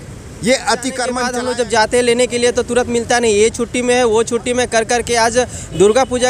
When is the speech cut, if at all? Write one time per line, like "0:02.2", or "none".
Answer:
0:01.2